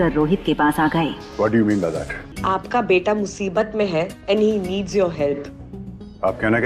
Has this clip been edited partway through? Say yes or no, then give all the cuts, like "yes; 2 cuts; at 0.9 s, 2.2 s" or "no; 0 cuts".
yes; 1 cut; at 2.4 s